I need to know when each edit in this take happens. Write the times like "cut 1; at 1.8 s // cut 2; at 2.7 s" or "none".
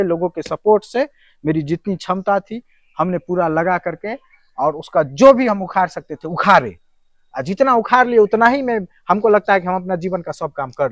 none